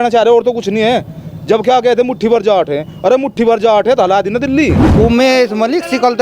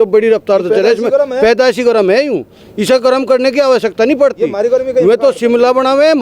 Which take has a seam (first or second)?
first